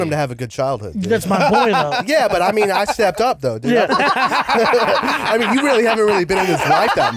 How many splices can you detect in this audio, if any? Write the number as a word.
one